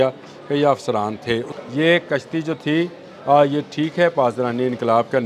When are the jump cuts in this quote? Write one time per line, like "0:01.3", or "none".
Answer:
0:01.5